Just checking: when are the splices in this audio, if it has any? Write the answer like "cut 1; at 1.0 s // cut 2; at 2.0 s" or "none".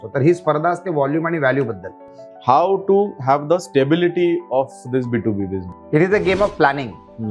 cut 1; at 2.0 s // cut 2; at 5.7 s